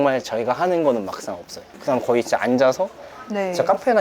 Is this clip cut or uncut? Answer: cut